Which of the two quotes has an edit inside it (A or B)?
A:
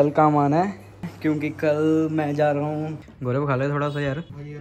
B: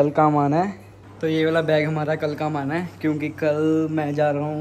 A